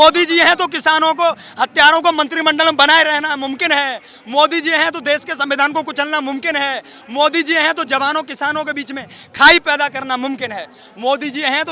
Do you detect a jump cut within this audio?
no; 0 cuts

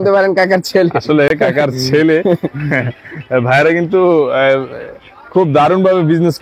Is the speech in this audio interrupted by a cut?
no; 0 cuts

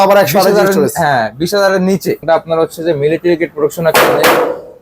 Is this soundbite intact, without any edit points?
no; 1 cut; at 2.2 s

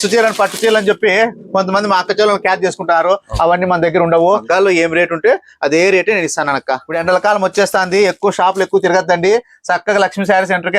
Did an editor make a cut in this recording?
yes; 2 cuts; at 4.4 s, 6.9 s

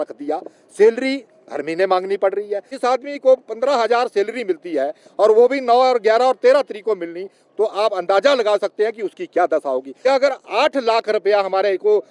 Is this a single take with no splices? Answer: no; 2 cuts; at 2.7 s, 9.9 s

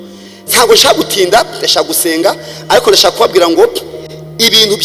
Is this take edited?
no; 0 cuts

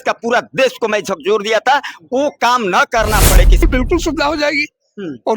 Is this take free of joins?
no; 1 cut; at 3.6 s

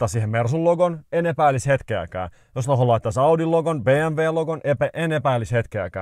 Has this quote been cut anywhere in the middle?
no; 0 cuts

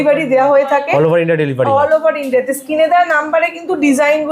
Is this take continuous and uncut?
yes; 0 cuts

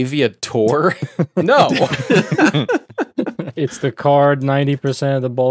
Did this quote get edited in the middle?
yes; 1 cut; at 3.4 s

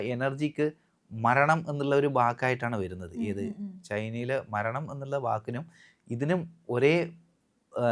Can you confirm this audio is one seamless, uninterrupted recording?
yes; 0 cuts

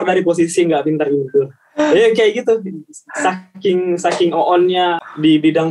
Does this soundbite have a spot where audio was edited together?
no; 0 cuts

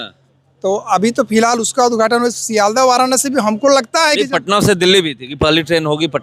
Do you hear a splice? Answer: no; 0 cuts

